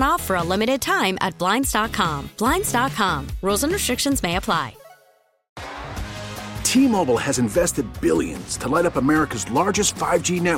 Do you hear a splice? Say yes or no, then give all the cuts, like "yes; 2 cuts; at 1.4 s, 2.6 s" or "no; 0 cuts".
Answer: yes; 1 cut; at 5.6 s